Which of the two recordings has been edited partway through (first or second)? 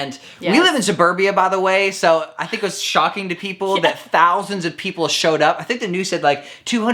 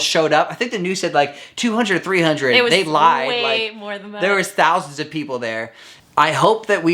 second